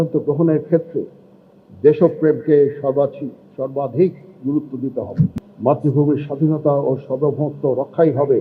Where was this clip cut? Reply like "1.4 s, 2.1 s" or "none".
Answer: 5.4 s